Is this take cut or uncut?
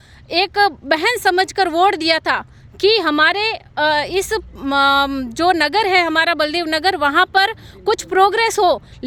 uncut